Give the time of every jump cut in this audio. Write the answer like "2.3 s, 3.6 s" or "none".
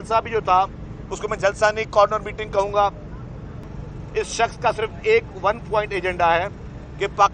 3.7 s